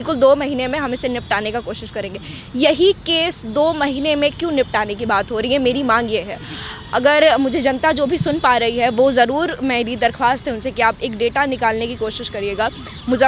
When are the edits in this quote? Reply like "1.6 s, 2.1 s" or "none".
none